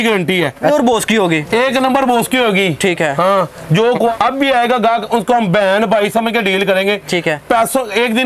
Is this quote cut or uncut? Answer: cut